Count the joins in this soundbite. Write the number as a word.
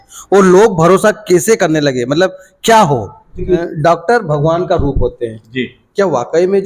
one